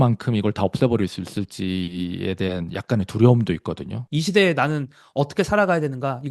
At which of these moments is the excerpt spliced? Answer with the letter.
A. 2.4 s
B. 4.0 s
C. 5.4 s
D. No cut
B